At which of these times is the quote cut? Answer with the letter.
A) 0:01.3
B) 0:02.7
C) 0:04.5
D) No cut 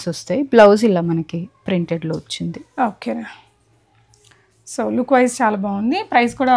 D